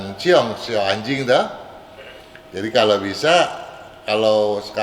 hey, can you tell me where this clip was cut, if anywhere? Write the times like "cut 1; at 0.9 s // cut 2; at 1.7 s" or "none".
none